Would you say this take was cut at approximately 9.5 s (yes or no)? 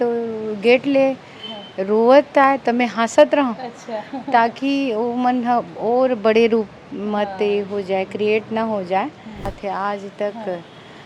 yes